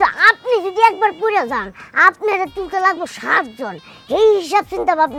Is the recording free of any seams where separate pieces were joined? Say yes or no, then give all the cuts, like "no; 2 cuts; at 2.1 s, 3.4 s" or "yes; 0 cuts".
yes; 0 cuts